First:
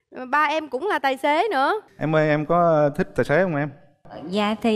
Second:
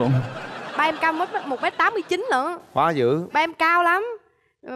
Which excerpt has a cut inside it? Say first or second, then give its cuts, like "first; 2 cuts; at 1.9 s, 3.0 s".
first; 1 cut; at 1.9 s